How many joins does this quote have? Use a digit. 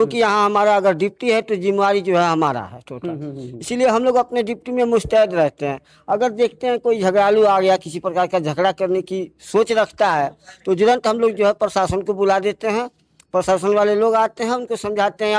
0